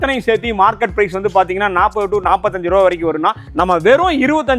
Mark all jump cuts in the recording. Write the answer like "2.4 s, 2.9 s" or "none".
none